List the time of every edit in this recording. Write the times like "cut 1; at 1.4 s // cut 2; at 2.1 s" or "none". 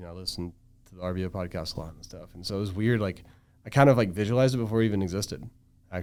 none

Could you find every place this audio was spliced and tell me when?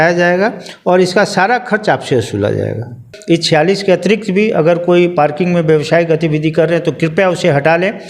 cut 1; at 3.1 s

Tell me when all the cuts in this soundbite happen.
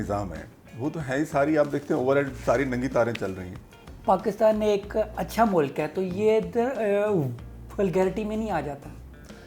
cut 1; at 3.9 s

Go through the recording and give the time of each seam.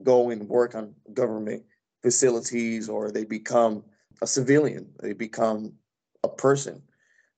none

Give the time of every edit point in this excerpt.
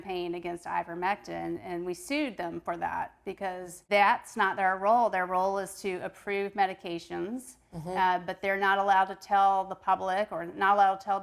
none

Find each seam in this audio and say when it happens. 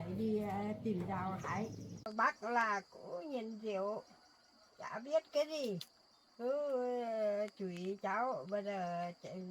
cut 1; at 2.1 s

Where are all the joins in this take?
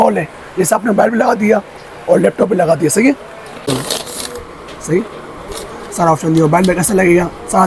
cut 1; at 3.7 s

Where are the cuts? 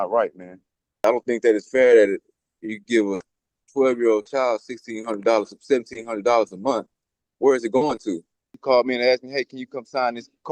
cut 1; at 1.0 s // cut 2; at 8.6 s

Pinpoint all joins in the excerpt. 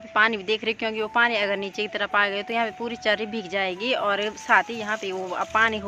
none

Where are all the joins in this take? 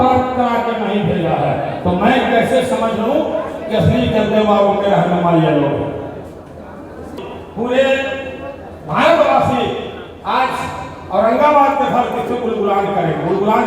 cut 1; at 7.2 s

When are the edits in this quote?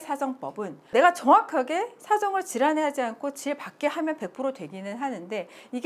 cut 1; at 0.9 s

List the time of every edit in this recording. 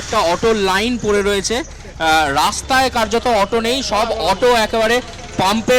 none

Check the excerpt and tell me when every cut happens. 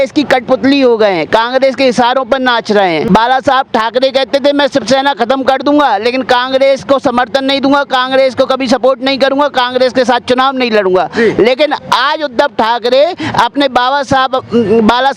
cut 1; at 3.0 s

